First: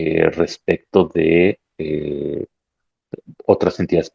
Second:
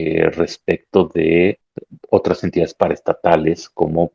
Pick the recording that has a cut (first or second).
second